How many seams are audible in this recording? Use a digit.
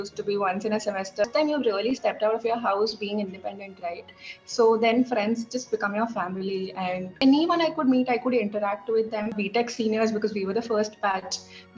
3